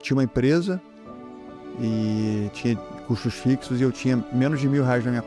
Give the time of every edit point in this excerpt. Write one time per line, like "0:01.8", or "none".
none